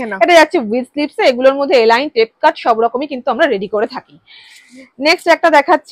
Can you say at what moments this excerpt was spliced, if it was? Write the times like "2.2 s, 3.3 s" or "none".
none